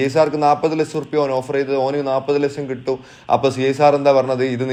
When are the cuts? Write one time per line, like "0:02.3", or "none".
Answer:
none

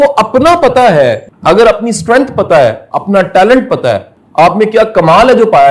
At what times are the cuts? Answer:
0:01.3
0:04.2

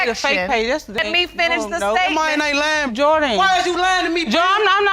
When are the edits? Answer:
0:01.0

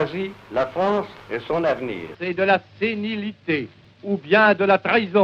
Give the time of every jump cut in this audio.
0:02.1
0:03.8

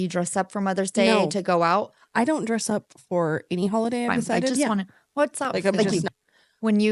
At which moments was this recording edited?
0:04.5

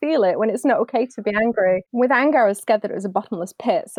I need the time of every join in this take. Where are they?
0:01.9

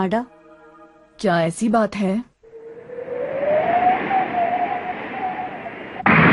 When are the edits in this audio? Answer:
none

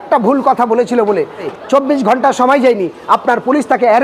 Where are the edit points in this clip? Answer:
0:01.5

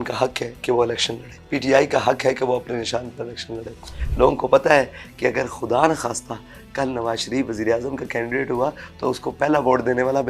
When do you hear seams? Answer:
0:01.3
0:04.0

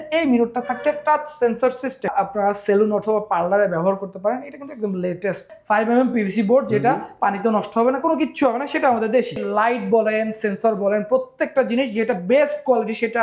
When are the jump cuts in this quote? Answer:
0:02.1
0:05.5
0:09.4

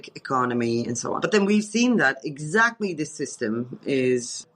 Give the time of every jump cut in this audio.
0:01.2

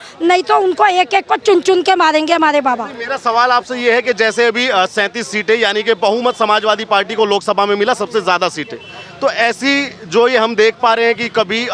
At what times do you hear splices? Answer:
none

